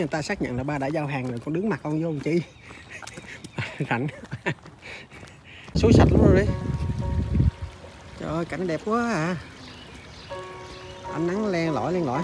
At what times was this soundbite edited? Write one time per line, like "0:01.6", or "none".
0:05.8